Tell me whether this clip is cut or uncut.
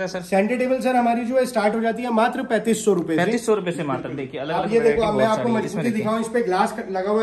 uncut